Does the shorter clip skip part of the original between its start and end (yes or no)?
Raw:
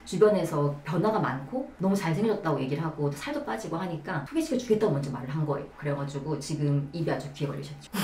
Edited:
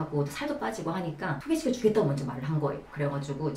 no